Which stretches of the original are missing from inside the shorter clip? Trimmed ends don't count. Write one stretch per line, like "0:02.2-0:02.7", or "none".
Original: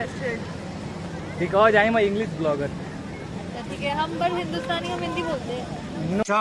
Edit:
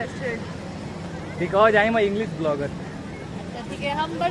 none

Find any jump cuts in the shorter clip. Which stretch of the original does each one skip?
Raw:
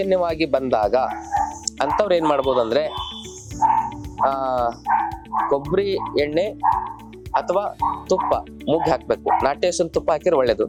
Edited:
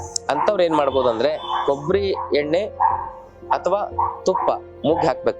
0:03.0-0:05.3

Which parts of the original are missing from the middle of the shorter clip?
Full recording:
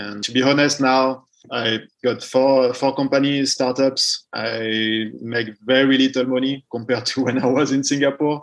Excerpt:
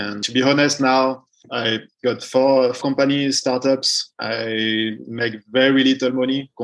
0:02.8-0:02.9

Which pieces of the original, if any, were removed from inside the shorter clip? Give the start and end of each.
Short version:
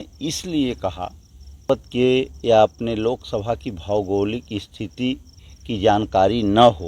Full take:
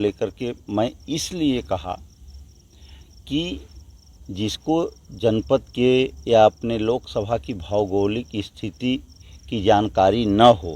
0:02.5-0:05.5

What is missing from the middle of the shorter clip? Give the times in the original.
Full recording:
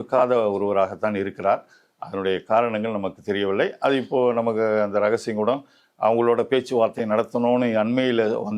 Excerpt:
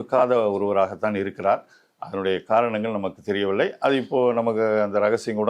none

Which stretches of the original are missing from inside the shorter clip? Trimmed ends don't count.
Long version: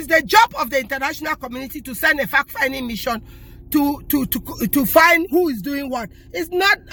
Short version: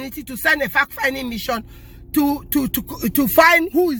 none

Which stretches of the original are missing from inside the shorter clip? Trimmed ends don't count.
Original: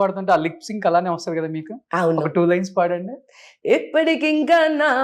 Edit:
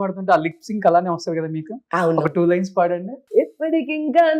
0:03.1-0:03.5

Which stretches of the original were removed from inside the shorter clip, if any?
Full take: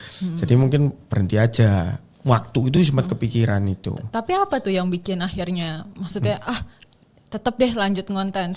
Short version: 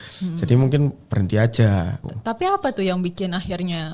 0:02.1-0:03.9

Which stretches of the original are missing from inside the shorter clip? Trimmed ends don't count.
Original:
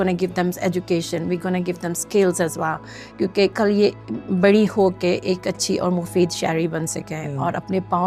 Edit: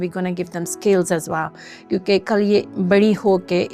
0:04.0-0:04.2

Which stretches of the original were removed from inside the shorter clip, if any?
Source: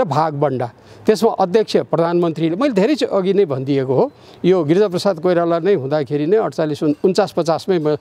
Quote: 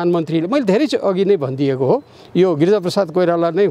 none

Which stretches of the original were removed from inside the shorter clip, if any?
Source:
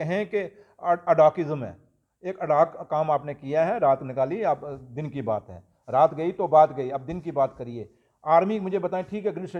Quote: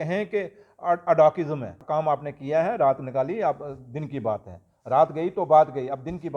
0:01.8-0:02.8

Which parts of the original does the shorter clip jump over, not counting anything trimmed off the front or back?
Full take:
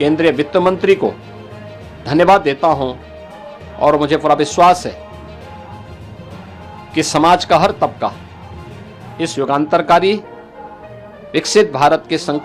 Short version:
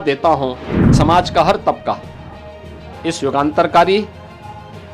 0:03.3-0:07.1

